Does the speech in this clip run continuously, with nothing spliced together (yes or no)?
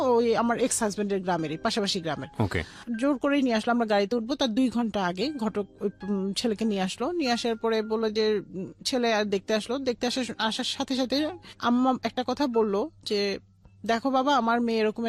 yes